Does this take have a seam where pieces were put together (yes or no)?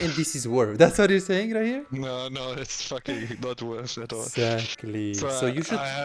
no